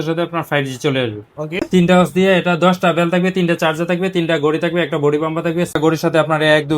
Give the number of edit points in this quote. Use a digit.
2